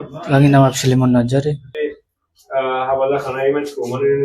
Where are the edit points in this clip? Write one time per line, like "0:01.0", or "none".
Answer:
0:01.8